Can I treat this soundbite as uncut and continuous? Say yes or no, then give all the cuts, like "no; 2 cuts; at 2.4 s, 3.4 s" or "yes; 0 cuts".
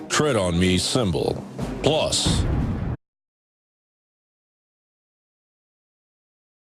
yes; 0 cuts